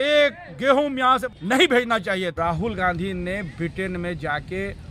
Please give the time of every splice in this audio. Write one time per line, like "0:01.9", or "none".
0:01.3
0:02.4